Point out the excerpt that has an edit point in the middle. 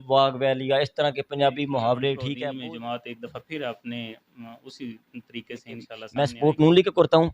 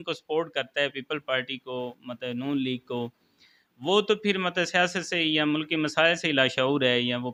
first; 2 cuts; at 2.3 s, 6.0 s

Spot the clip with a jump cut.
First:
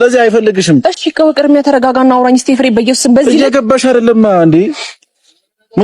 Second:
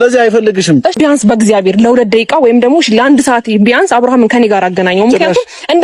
second; 1 cut; at 0.9 s

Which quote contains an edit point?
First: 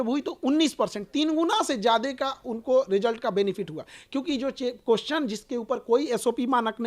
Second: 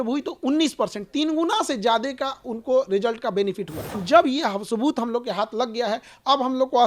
second; 1 cut; at 4.0 s

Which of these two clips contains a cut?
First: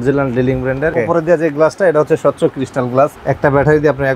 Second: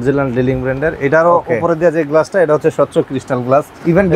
first; 2 cuts; at 0.9 s, 3.2 s

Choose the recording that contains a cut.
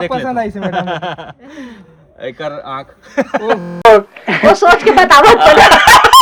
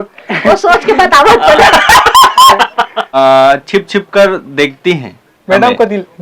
second; 1 cut; at 3.1 s

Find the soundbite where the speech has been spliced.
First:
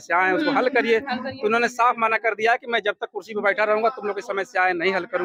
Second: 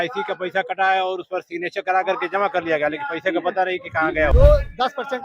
second; 1 cut; at 4.3 s

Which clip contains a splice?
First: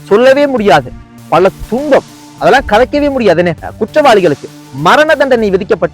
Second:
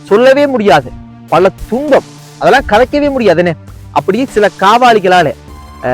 first; 1 cut; at 3.7 s

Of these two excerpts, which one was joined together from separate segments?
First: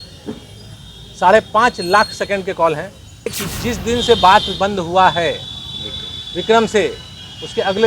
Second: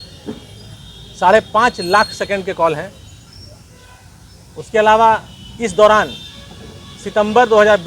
first; 1 cut; at 3.5 s

